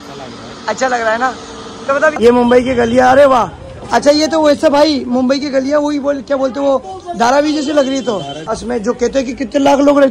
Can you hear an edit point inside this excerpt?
yes; 2 cuts; at 2.1 s, 8.5 s

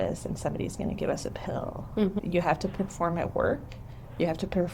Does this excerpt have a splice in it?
yes; 1 cut; at 2.2 s

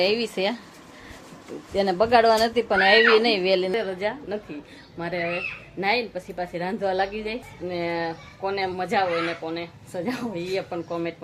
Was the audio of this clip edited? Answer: yes; 2 cuts; at 3.7 s, 7.5 s

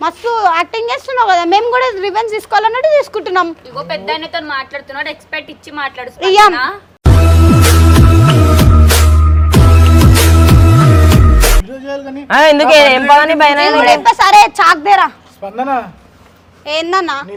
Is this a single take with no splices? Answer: yes; 0 cuts

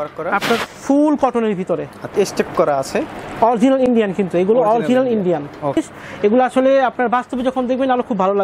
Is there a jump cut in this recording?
yes; 2 cuts; at 2.1 s, 5.8 s

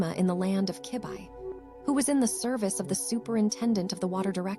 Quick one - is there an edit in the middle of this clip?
no; 0 cuts

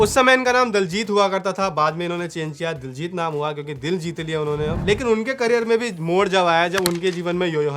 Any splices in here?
yes; 1 cut; at 4.8 s

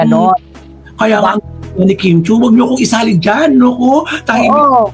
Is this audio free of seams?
yes; 0 cuts

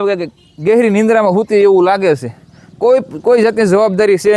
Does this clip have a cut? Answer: no; 0 cuts

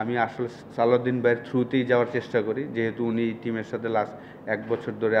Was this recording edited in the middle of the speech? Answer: no; 0 cuts

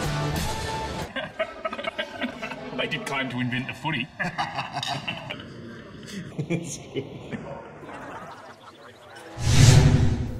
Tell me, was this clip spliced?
yes; 1 cut; at 9.5 s

